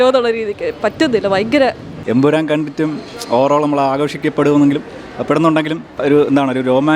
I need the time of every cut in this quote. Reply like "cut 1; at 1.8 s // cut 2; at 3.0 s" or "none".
cut 1; at 1.9 s // cut 2; at 5.9 s